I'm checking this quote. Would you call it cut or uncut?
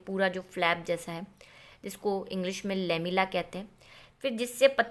uncut